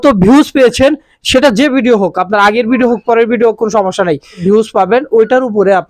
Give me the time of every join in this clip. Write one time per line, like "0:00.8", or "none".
0:04.4